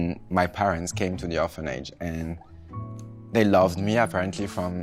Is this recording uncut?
yes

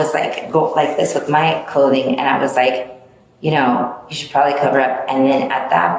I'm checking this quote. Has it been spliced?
no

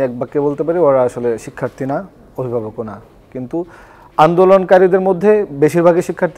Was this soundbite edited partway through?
no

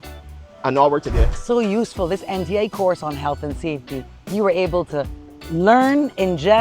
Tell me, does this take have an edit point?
yes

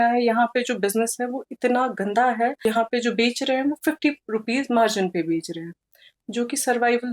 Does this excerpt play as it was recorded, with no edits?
no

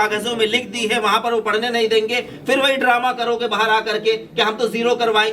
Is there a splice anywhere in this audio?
no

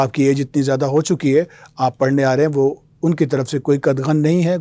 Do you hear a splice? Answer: no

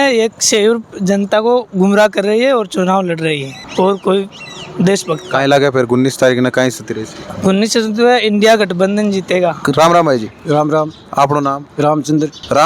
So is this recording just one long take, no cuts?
yes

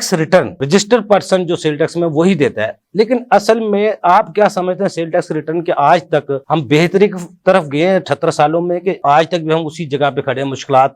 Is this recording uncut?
yes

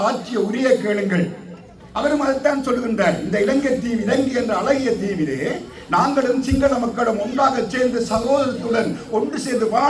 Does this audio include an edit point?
no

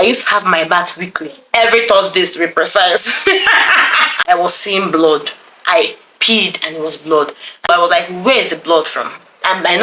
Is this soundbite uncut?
no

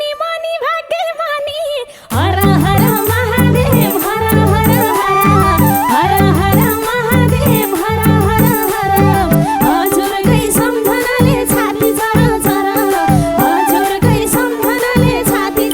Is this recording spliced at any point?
no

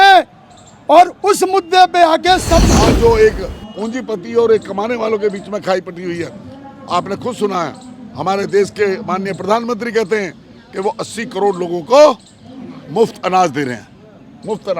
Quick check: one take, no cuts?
no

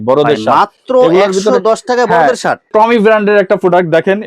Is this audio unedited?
no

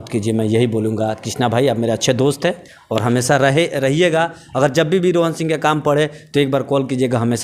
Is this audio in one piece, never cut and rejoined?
yes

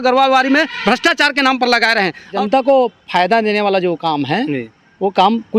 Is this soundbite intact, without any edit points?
no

